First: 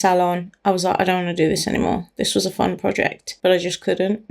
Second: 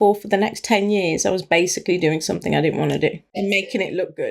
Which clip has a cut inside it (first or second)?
first